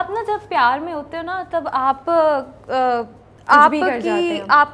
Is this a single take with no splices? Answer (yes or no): yes